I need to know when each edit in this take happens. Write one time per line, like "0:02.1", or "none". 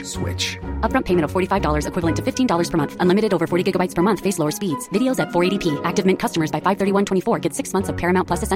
none